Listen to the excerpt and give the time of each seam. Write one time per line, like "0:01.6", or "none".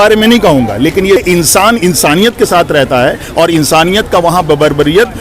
0:01.2